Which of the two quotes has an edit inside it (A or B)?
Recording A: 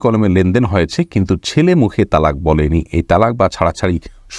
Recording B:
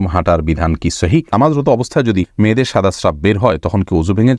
B